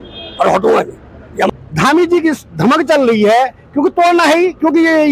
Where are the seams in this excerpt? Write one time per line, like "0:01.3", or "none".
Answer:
0:01.5